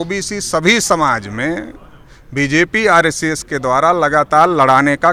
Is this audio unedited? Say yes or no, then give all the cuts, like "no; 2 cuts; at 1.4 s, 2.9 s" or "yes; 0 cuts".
yes; 0 cuts